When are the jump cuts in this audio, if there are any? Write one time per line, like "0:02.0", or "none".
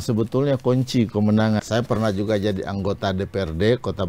0:01.6